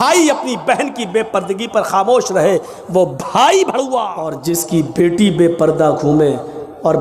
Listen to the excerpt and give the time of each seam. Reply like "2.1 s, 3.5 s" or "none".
4.4 s